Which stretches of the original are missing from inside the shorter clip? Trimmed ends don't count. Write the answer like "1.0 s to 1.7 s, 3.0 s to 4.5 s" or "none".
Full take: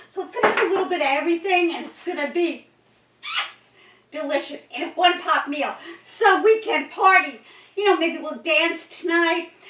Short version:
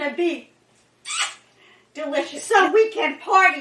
4.5 s to 6.1 s